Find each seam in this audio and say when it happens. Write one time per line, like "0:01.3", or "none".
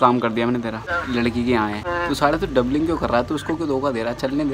0:00.9
0:01.8

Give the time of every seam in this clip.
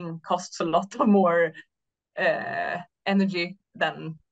none

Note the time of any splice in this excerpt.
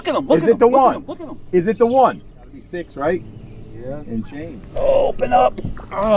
0:02.6
0:04.3

